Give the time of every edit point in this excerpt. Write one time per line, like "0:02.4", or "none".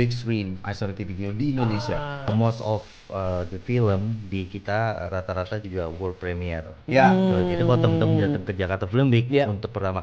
0:02.3